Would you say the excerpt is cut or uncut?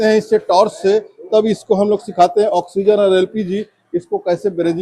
uncut